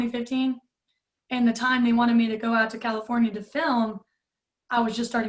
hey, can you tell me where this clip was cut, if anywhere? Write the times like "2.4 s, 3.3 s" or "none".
none